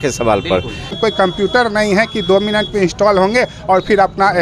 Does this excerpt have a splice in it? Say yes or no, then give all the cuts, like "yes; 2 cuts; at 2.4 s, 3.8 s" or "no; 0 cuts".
yes; 1 cut; at 0.9 s